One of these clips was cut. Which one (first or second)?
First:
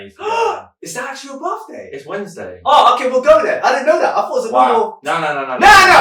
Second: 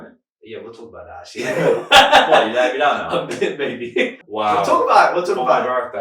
second